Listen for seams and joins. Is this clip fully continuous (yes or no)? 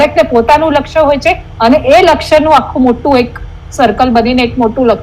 yes